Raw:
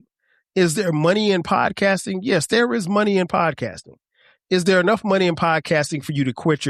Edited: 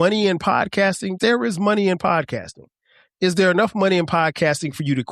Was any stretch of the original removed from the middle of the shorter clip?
yes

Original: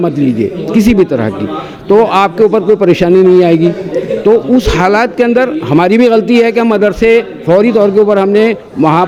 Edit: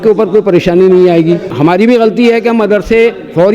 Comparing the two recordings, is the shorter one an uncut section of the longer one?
no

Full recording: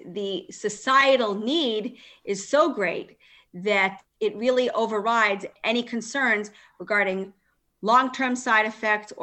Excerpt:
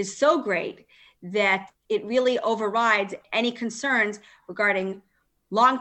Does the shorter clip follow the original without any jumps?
yes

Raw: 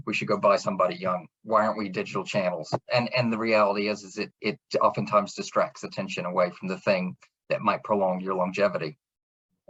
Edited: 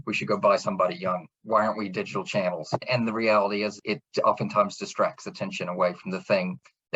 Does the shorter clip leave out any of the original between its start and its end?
yes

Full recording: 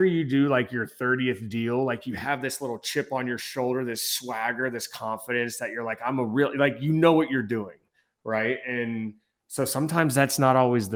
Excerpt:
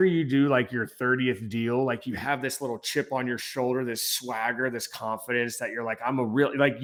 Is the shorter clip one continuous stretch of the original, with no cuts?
yes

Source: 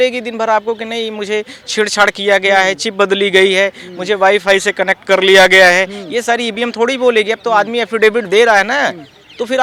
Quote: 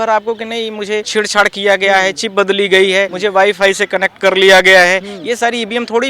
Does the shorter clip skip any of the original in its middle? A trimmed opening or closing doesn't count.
yes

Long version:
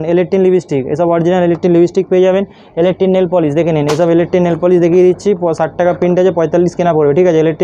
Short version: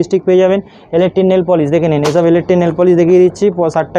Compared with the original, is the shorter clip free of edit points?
yes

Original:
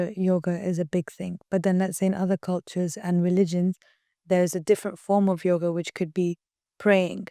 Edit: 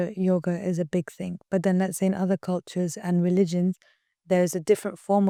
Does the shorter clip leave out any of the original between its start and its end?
no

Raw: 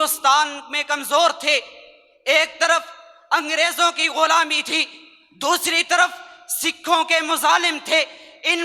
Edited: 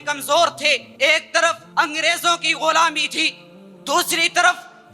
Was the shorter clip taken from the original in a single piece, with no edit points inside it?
no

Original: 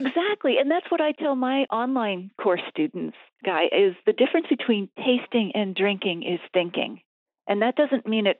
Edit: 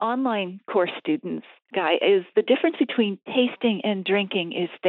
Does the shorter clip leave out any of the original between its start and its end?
no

